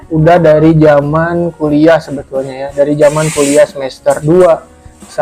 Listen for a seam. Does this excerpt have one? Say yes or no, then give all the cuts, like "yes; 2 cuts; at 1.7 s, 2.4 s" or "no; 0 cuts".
no; 0 cuts